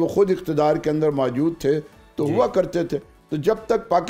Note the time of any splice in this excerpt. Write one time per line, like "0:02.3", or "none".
none